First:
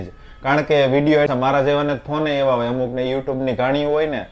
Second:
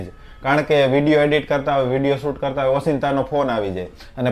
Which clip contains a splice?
first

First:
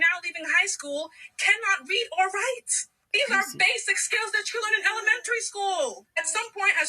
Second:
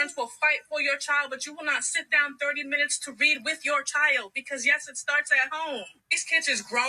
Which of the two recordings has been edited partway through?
first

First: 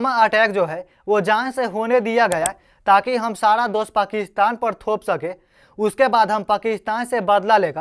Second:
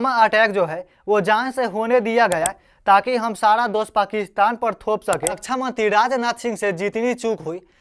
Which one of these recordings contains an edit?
second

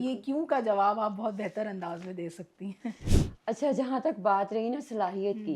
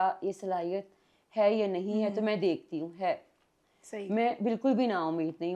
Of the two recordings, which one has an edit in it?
first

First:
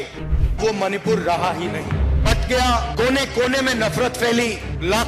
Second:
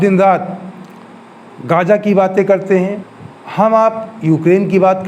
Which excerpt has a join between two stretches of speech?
second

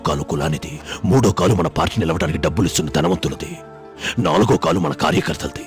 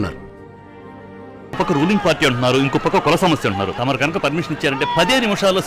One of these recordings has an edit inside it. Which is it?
second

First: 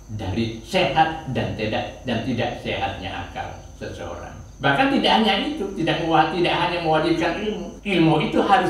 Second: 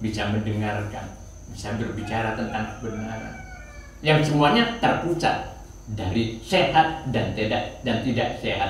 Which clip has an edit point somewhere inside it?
first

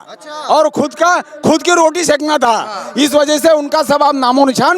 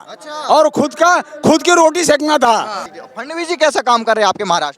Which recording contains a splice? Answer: second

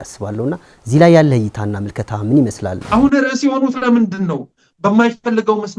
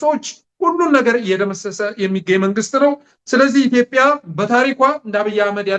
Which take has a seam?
first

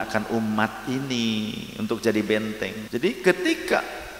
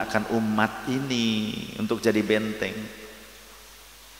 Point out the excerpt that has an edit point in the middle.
first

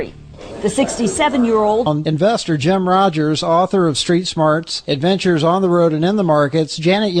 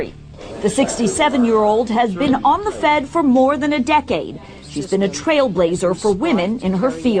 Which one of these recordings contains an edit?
second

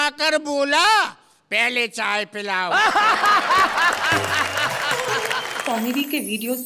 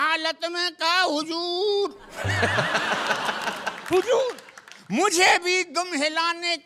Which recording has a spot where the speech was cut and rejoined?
first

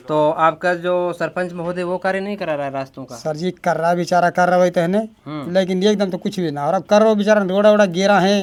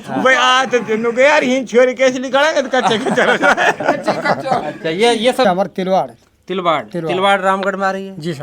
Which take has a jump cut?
second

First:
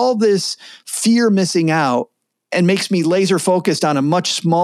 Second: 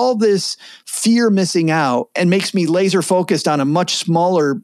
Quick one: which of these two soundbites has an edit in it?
second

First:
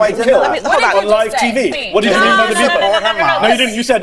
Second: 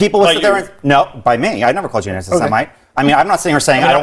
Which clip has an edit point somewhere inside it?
first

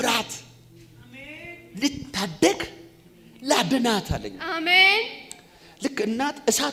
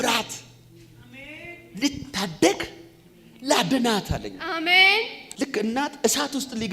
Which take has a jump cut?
second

